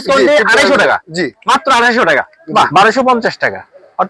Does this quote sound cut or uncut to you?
cut